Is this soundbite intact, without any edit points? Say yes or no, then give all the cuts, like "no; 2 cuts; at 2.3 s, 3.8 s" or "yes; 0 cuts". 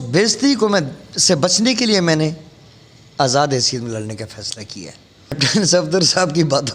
no; 1 cut; at 5.3 s